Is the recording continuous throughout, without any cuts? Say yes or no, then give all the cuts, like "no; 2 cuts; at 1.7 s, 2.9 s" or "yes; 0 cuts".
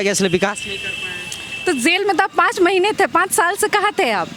yes; 0 cuts